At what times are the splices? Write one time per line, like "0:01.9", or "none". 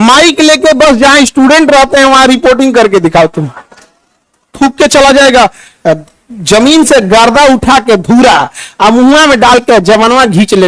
0:04.5